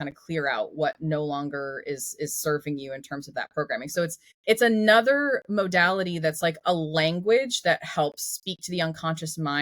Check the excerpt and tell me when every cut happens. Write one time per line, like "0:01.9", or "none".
0:04.3

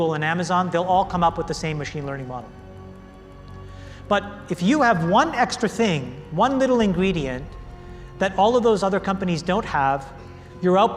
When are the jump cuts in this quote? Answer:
none

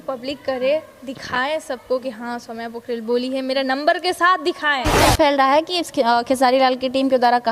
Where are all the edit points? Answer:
0:05.1

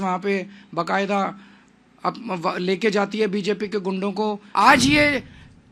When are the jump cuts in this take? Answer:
0:04.4

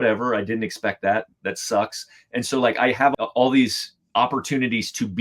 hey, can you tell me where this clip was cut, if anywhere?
0:03.1

